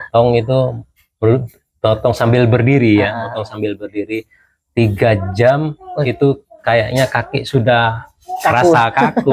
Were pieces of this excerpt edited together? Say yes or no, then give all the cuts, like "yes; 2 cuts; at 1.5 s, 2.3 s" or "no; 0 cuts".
no; 0 cuts